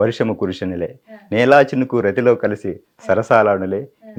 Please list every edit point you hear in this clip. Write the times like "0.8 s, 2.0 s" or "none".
none